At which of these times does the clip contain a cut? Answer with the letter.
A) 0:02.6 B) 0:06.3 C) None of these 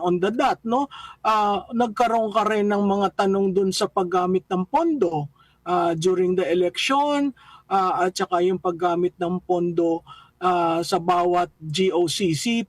C